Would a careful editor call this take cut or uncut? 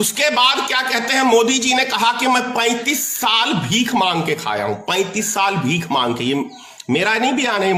uncut